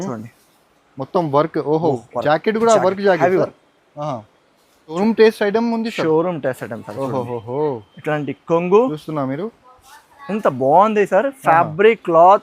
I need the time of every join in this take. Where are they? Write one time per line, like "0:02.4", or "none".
0:05.0